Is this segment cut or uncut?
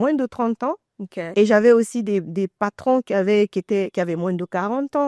uncut